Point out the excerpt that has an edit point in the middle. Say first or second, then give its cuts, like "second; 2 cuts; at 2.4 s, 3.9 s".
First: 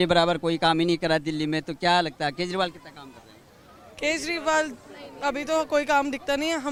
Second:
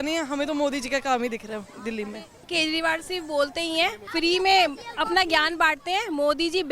second; 2 cuts; at 2.5 s, 4.0 s